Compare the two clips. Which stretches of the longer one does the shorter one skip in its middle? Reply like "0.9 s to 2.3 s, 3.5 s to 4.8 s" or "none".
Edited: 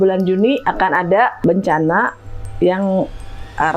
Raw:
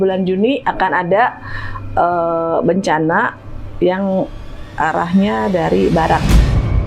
1.4 s to 2.6 s